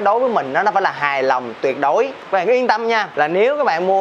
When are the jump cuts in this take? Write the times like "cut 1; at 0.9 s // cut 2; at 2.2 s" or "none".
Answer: cut 1; at 2.2 s // cut 2; at 3.1 s

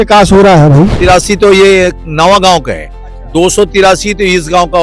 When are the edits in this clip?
cut 1; at 1.0 s

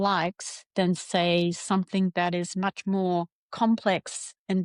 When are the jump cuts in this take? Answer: none

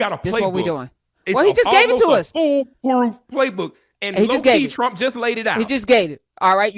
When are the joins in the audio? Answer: none

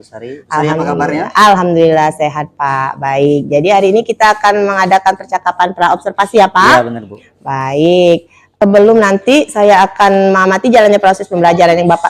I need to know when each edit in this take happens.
cut 1; at 8.4 s

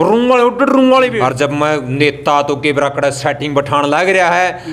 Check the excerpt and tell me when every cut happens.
cut 1; at 1.1 s

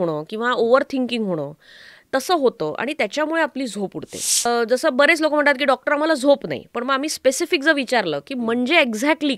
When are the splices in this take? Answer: cut 1; at 4.5 s

